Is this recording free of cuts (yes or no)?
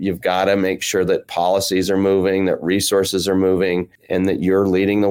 no